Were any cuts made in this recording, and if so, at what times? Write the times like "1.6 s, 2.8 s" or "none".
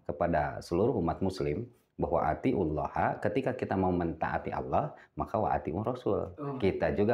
none